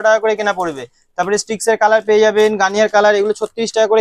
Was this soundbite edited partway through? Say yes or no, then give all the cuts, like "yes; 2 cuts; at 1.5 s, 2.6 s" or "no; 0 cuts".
no; 0 cuts